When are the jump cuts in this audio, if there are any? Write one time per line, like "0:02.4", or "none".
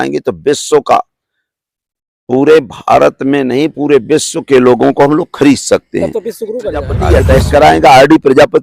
0:07.0